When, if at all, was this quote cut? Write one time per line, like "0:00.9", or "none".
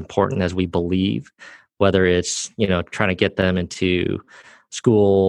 none